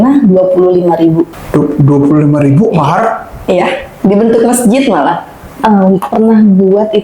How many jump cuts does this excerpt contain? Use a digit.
2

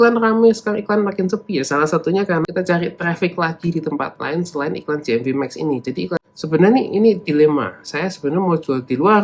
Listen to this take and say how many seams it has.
2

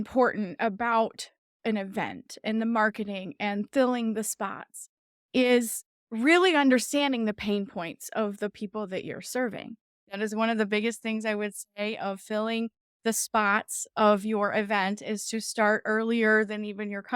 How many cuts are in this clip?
1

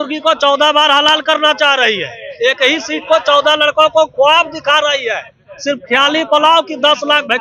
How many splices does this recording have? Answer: 0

